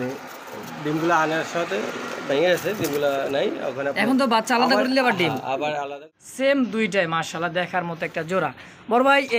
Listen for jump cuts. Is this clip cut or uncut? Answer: cut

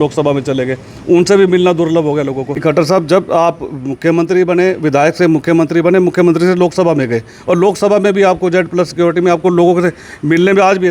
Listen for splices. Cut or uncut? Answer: cut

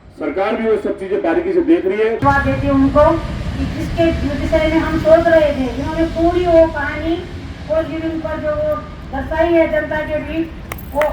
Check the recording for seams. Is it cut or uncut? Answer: cut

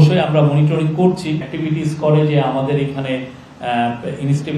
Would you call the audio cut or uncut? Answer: cut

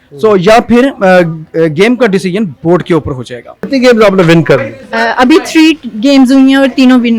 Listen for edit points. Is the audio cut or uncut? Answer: cut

